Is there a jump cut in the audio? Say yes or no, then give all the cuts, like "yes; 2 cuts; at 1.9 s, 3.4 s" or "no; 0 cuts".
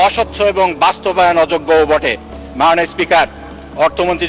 no; 0 cuts